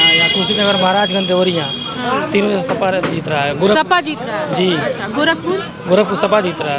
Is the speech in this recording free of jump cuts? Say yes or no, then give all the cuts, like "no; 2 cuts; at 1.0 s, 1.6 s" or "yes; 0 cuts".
yes; 0 cuts